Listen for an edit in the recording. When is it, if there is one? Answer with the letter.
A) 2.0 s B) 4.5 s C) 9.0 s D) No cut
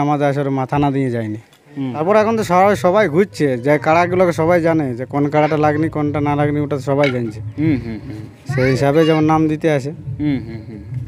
A